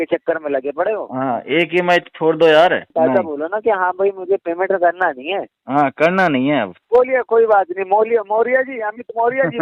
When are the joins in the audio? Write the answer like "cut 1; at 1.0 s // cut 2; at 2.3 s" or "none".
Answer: cut 1; at 2.9 s // cut 2; at 6.8 s